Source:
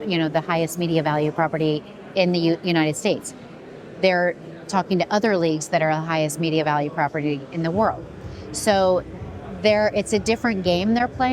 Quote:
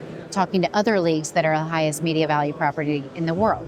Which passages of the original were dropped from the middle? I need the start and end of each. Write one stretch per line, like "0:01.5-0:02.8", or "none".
none